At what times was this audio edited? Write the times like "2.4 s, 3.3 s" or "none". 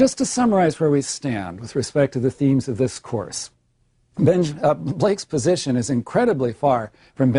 5.5 s